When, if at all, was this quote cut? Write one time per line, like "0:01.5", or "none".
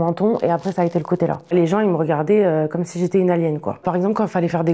0:01.5